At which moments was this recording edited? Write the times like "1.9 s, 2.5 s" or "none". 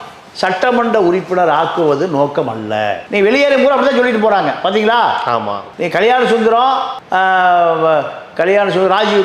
none